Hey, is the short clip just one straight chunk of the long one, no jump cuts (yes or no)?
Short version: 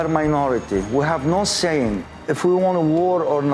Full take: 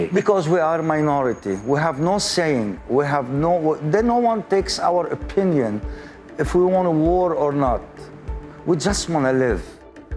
no